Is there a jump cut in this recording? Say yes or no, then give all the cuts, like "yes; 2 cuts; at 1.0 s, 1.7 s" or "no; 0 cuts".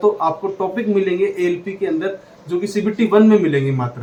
no; 0 cuts